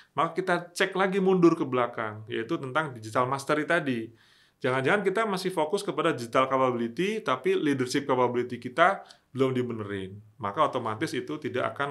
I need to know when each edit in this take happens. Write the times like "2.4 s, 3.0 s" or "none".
none